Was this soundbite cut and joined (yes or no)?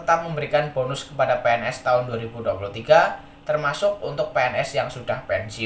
no